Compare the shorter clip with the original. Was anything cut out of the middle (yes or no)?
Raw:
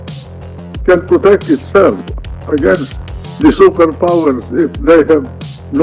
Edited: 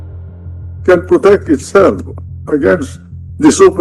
no